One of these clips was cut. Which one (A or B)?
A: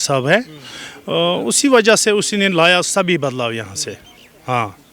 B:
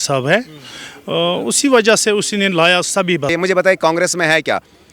B